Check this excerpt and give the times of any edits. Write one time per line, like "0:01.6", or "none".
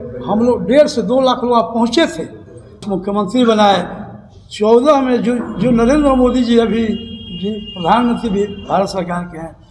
0:02.8